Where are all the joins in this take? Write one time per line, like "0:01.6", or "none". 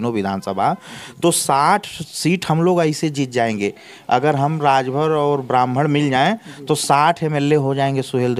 none